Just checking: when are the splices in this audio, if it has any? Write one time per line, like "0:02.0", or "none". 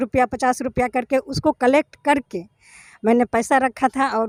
none